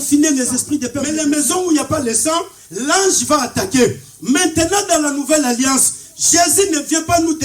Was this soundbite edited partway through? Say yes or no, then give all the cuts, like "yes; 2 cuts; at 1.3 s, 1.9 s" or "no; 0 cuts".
yes; 1 cut; at 1.0 s